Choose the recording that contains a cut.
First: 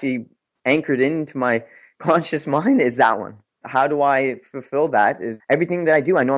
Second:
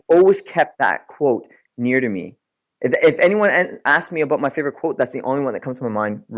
first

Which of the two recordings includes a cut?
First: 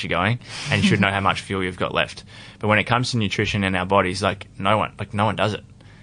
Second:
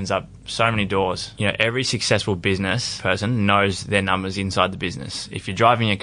second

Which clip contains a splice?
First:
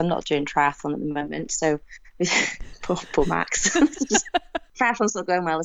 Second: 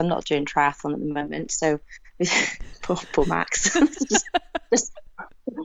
first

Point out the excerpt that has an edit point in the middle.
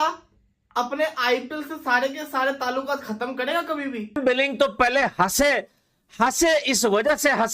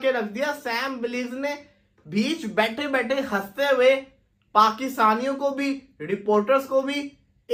first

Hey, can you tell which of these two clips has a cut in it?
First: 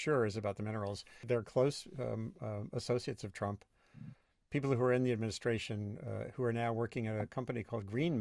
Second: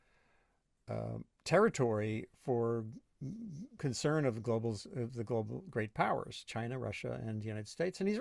first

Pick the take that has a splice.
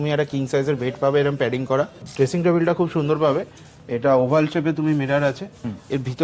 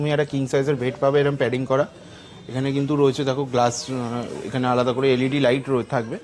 first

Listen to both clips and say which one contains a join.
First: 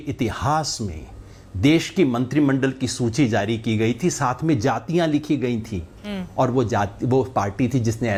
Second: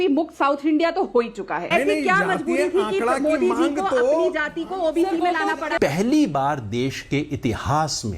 second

